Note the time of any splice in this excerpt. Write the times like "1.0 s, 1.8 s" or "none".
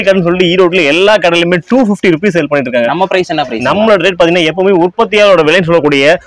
none